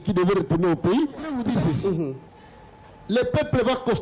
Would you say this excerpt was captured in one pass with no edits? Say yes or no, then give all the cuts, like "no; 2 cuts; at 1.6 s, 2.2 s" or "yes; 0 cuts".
no; 1 cut; at 1.3 s